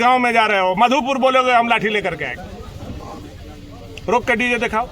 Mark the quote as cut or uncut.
cut